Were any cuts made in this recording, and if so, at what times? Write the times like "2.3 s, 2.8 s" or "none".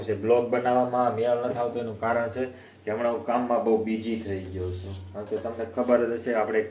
none